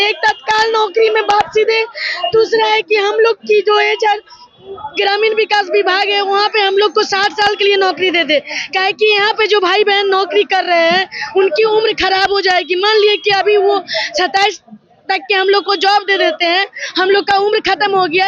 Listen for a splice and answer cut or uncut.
uncut